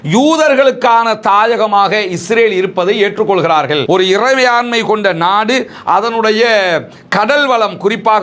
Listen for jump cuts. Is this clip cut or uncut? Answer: cut